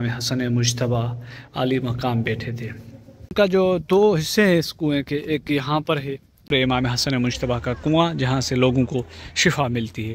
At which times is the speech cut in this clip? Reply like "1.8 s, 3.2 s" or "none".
3.3 s, 6.5 s